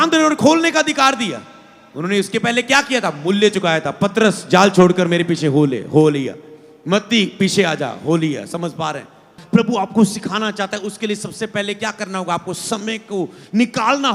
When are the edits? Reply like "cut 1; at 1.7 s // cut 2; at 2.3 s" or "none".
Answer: cut 1; at 9.4 s